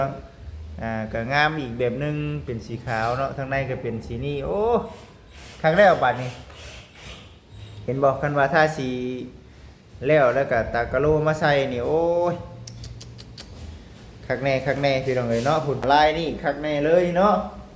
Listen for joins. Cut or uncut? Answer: cut